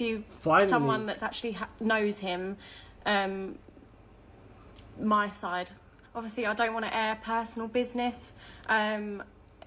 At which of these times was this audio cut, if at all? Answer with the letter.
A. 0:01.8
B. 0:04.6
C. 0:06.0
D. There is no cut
C